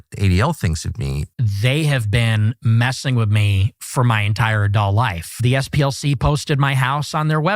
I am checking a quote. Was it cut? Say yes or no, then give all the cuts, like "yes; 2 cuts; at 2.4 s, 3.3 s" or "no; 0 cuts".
yes; 2 cuts; at 1.2 s, 5.3 s